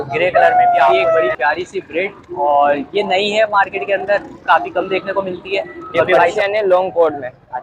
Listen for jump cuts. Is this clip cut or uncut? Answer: cut